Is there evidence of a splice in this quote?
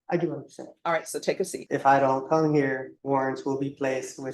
yes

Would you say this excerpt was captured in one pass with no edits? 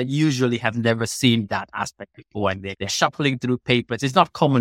no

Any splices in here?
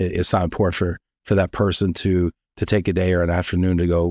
no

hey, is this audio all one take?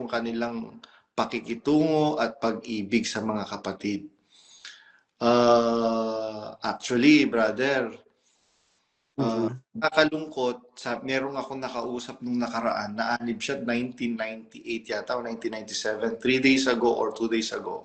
yes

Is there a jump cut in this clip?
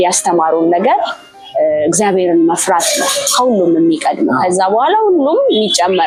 no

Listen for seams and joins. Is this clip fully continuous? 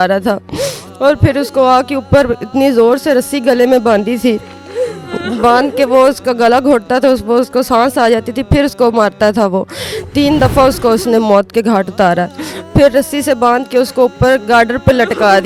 yes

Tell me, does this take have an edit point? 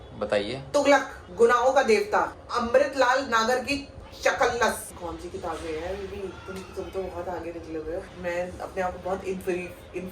yes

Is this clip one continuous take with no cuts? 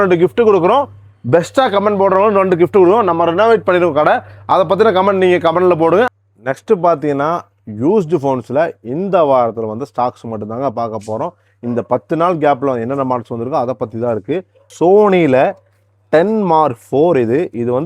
no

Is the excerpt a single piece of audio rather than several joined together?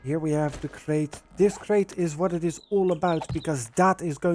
yes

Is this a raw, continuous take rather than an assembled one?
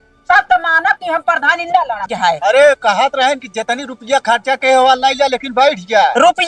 no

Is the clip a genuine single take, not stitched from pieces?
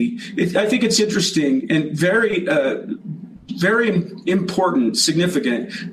yes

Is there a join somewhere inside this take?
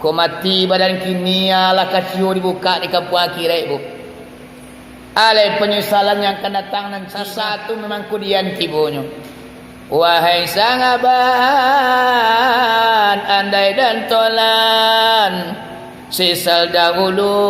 yes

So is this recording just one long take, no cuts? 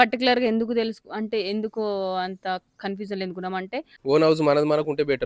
no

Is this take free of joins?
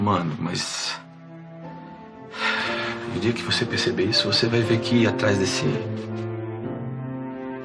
no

